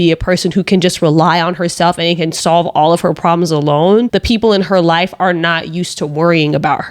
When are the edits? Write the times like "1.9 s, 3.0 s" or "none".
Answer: 4.1 s